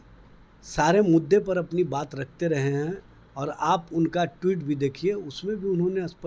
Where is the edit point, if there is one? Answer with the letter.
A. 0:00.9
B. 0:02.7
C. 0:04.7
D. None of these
D